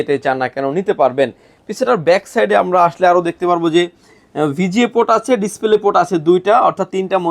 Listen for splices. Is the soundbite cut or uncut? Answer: uncut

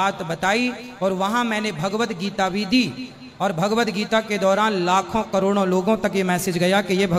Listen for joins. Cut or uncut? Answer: uncut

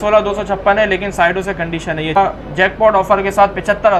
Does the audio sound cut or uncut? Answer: cut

